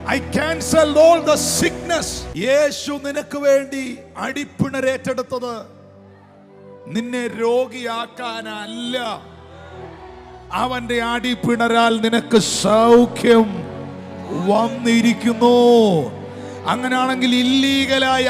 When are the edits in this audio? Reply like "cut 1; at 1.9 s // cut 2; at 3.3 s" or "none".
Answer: cut 1; at 2.4 s